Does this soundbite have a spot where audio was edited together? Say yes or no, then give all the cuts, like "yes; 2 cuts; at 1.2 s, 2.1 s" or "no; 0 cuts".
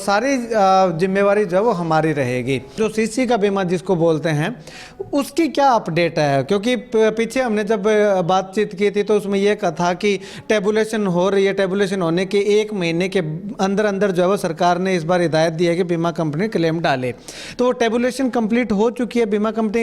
yes; 1 cut; at 2.8 s